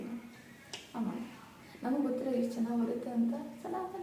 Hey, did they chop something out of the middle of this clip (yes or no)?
no